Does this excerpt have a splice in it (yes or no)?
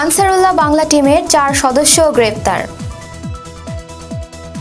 yes